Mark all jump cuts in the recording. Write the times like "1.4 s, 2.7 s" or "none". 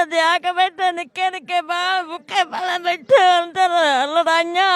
none

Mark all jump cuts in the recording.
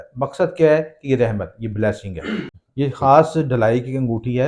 2.6 s

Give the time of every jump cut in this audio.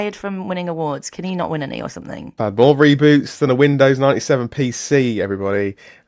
2.4 s

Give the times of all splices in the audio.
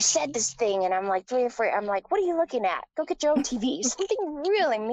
none

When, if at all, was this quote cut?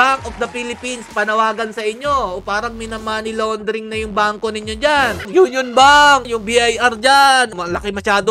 5.2 s, 6.2 s, 7.5 s

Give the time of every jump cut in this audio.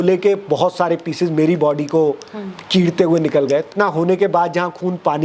3.7 s

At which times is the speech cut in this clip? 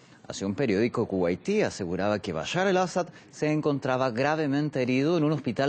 1.0 s

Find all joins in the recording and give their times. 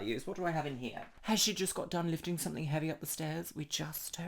1.2 s

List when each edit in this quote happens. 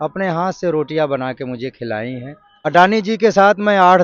2.7 s

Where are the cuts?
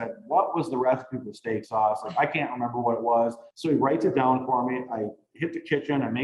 3.5 s

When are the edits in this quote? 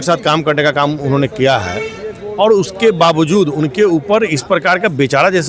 none

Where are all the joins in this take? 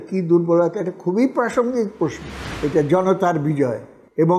2.4 s

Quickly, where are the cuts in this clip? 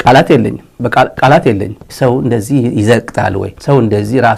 1.8 s

